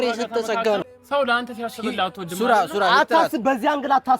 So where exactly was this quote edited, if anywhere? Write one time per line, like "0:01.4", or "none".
0:00.9